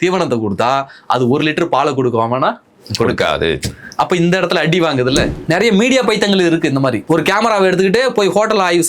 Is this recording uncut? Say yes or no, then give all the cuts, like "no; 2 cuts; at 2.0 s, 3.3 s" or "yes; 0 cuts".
no; 2 cuts; at 5.3 s, 7.0 s